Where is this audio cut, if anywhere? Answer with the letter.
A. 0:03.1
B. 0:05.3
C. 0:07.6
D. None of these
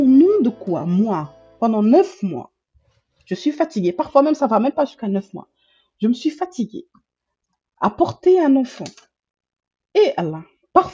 D